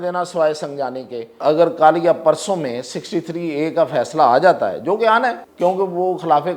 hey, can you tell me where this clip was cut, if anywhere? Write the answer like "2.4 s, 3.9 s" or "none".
1.4 s, 5.4 s